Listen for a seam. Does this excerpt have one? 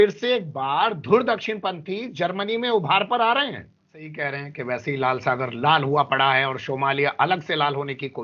yes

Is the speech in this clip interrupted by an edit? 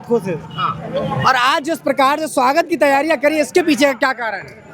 no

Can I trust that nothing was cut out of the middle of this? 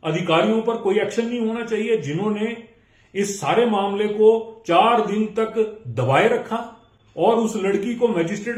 yes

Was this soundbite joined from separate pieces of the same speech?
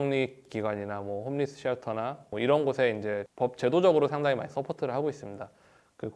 yes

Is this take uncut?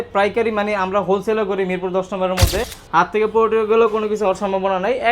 no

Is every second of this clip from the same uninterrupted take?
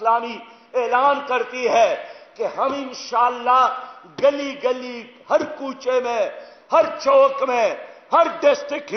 yes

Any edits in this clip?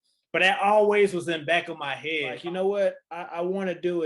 yes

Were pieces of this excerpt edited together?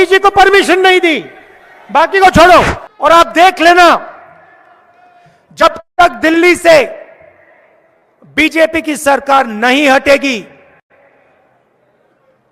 yes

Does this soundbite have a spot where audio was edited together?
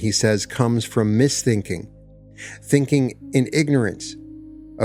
no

